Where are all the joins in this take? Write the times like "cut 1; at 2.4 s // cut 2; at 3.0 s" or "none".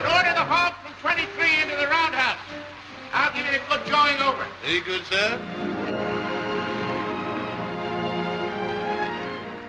cut 1; at 5.8 s